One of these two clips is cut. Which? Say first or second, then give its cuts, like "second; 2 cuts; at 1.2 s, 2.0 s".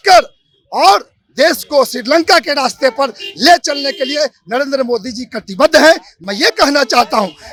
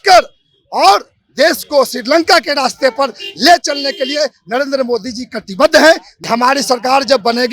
second; 1 cut; at 6.1 s